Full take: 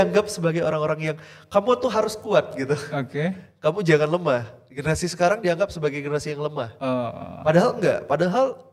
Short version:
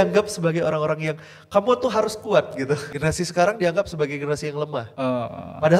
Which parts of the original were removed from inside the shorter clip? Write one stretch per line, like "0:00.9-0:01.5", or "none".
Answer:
0:02.9-0:04.7